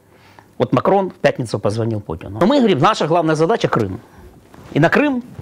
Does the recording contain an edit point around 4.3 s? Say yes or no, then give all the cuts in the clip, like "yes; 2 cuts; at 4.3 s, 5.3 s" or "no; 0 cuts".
no; 1 cut; at 2.4 s